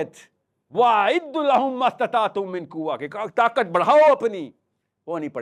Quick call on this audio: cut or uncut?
uncut